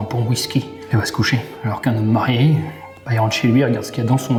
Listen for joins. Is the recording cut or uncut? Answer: uncut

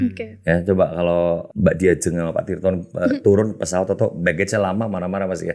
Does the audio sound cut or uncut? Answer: cut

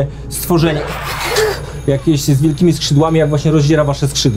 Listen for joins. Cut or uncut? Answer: uncut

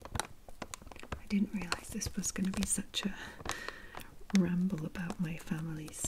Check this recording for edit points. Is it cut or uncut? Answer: uncut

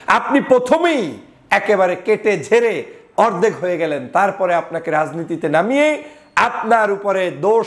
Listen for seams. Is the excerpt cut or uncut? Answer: uncut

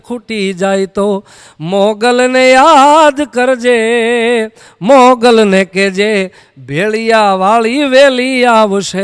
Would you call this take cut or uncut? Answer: uncut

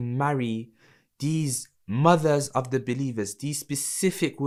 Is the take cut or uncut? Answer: uncut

